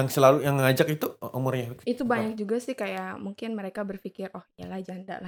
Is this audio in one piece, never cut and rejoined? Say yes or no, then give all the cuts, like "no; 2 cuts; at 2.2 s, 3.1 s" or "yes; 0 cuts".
yes; 0 cuts